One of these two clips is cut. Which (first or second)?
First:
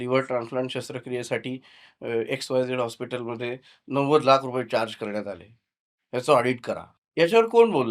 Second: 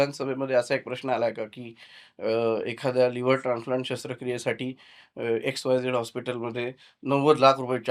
first